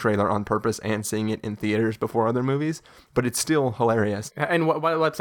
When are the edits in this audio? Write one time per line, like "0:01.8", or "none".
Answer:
0:04.3